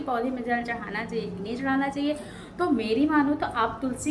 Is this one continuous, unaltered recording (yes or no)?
yes